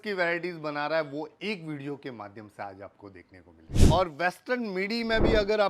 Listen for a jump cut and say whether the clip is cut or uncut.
cut